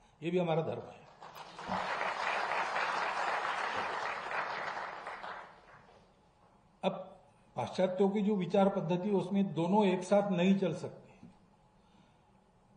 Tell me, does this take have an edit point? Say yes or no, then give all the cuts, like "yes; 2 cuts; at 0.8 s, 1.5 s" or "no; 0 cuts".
no; 0 cuts